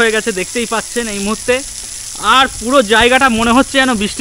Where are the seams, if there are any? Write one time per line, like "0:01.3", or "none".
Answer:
none